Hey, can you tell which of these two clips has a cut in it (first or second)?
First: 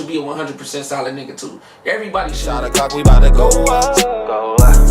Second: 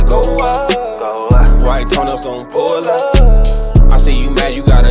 first